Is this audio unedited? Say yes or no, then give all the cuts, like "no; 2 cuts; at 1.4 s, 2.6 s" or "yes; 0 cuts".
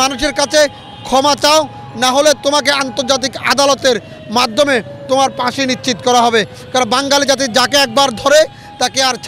yes; 0 cuts